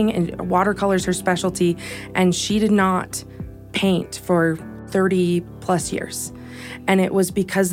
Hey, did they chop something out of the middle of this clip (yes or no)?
no